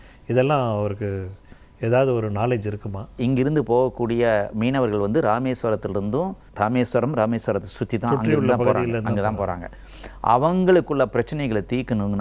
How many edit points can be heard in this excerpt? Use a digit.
2